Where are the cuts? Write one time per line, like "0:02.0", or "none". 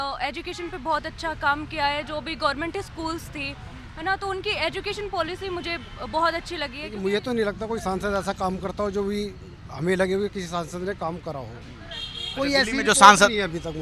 0:06.8